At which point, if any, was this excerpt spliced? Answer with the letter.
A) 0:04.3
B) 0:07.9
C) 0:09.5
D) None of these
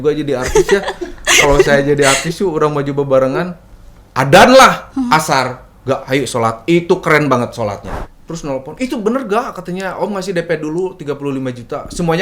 B